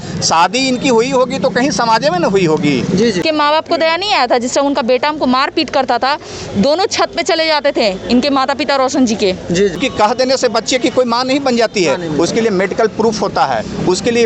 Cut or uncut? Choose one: cut